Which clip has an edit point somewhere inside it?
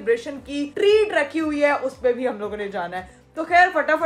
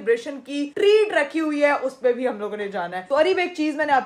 second; 1 cut; at 3.0 s

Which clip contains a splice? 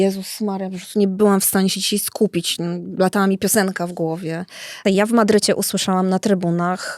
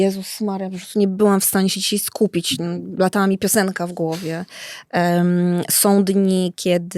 first; 1 cut; at 4.8 s

